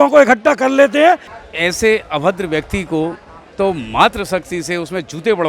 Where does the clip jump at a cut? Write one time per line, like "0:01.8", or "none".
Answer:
0:01.3